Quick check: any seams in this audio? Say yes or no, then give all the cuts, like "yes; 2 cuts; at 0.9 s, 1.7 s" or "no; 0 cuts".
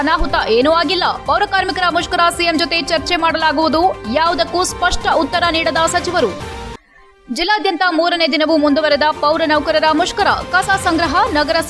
no; 0 cuts